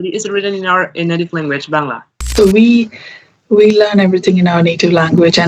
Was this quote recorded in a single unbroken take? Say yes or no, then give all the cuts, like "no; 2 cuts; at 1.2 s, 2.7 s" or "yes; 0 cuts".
no; 1 cut; at 2.3 s